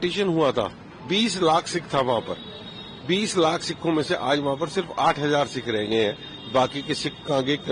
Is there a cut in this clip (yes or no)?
no